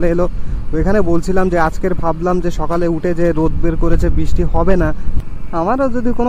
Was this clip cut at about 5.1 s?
yes; 1 cut; at 5.1 s

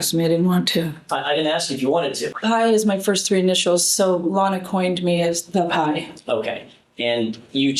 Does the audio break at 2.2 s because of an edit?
yes; 1 cut; at 2.2 s

